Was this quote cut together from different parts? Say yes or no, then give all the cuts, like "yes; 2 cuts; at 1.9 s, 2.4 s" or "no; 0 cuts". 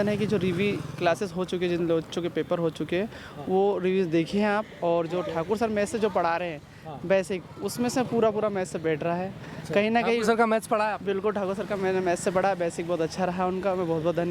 no; 0 cuts